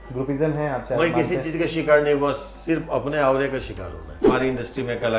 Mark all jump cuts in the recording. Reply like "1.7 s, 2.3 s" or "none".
4.3 s